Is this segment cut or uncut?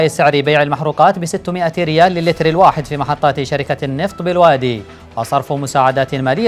uncut